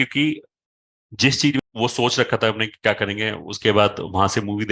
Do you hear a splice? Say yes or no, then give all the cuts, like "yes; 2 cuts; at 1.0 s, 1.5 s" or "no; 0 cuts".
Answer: yes; 1 cut; at 1.6 s